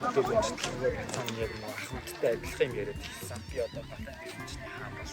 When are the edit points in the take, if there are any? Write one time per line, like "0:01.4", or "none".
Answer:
none